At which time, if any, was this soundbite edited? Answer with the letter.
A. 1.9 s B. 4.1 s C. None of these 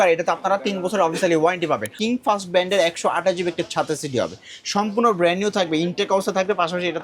A